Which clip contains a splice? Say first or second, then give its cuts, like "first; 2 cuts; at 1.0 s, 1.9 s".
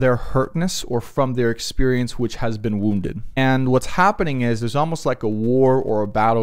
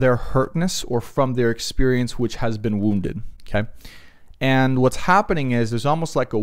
first; 1 cut; at 3.4 s